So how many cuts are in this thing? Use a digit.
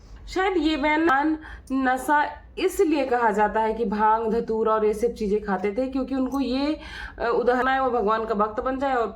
2